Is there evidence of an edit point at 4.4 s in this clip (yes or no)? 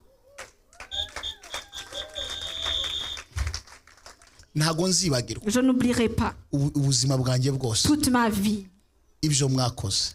yes